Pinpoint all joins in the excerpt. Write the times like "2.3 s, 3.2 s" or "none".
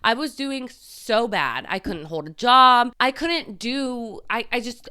2.9 s